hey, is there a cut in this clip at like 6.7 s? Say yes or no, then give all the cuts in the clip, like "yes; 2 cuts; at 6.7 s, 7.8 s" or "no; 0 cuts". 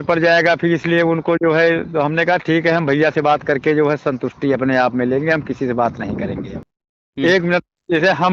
yes; 1 cut; at 6.7 s